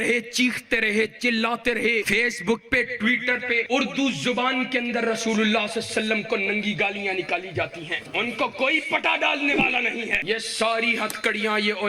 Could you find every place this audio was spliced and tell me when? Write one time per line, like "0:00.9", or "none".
0:02.1
0:03.6
0:08.0
0:10.2